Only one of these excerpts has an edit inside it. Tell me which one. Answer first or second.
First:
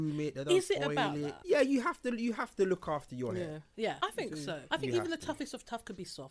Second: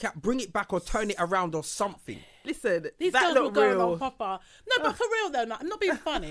first